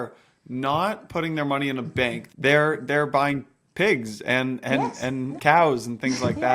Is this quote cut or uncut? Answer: cut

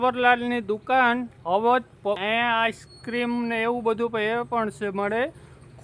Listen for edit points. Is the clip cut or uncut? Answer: cut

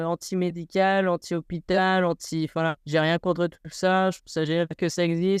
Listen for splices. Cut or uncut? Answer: cut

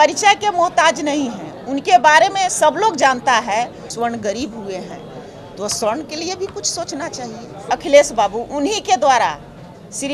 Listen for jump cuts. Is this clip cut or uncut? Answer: cut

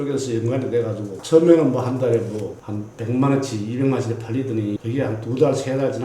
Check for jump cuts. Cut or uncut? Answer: cut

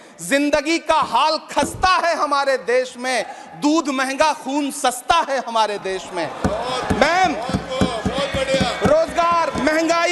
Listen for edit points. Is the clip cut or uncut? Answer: uncut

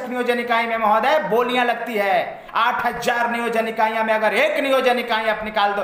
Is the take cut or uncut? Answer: uncut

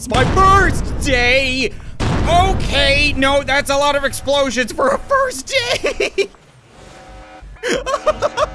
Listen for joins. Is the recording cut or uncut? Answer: cut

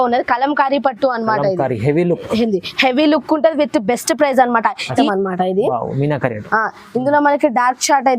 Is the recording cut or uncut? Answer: cut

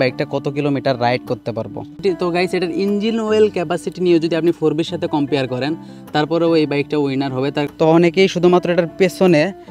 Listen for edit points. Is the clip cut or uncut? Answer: cut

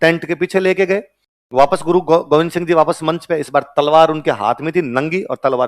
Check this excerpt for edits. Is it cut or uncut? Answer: uncut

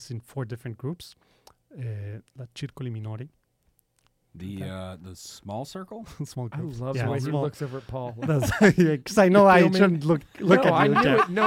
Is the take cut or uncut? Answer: uncut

